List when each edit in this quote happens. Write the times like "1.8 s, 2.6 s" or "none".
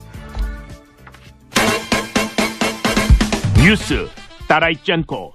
1.4 s